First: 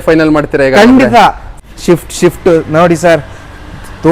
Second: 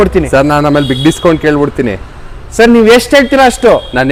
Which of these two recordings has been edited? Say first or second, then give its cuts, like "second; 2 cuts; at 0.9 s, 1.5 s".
first; 1 cut; at 1.5 s